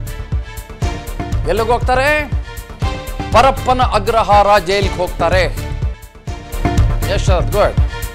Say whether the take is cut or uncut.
uncut